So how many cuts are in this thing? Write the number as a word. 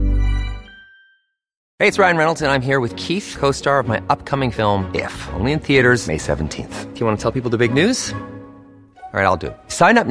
one